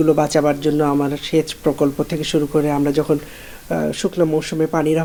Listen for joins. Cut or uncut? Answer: uncut